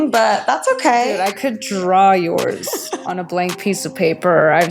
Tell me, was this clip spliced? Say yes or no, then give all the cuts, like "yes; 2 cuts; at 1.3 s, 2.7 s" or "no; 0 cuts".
no; 0 cuts